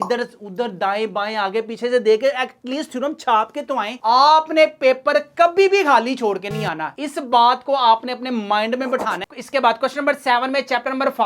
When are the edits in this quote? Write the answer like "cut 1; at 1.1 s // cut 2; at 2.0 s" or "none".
cut 1; at 3.9 s // cut 2; at 9.2 s